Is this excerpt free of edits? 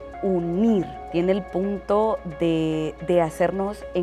no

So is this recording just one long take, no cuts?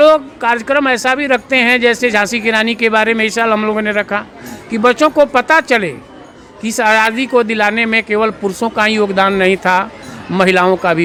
yes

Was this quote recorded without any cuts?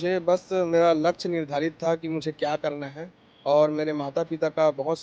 yes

